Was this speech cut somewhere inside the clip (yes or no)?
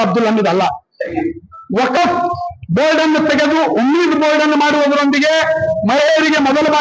yes